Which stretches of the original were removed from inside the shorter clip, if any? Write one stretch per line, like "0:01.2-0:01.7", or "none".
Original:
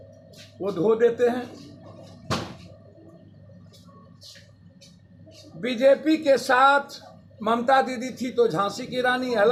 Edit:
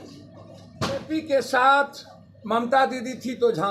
0:02.5-0:06.0